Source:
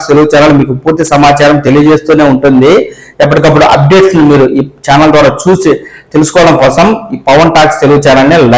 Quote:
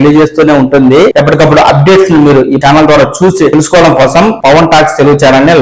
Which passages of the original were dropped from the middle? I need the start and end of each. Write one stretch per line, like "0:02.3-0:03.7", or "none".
0:02.8-0:03.2
0:04.6-0:04.8
0:05.8-0:06.1
0:07.0-0:07.2